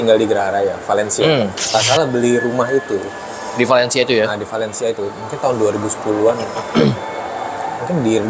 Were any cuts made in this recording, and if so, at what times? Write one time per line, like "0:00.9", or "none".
0:01.7